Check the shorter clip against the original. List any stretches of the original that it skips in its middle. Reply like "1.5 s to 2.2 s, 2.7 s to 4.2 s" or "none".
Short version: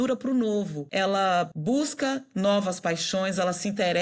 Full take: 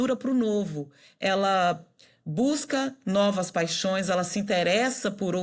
1.1 s to 1.8 s